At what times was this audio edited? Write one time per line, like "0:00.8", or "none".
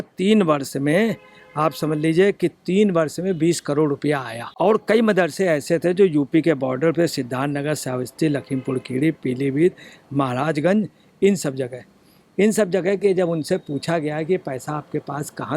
0:04.5